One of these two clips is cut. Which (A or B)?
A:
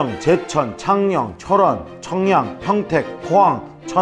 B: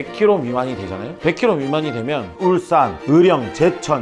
B